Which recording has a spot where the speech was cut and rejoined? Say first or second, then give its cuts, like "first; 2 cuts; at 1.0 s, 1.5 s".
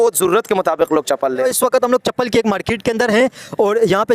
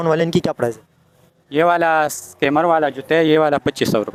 first; 1 cut; at 1.4 s